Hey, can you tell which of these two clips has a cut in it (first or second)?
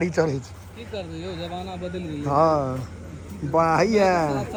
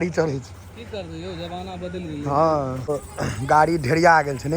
second